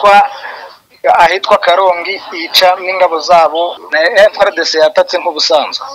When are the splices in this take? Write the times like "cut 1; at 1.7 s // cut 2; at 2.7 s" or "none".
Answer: cut 1; at 3.8 s

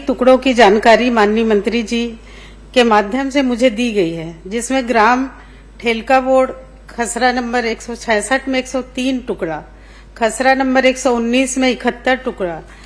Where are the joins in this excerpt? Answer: none

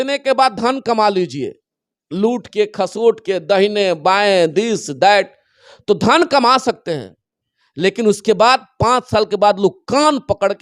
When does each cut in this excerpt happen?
none

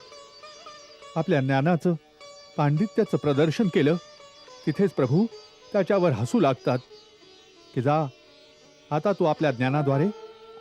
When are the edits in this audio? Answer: none

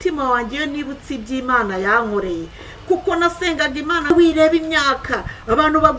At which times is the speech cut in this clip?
cut 1; at 4.1 s

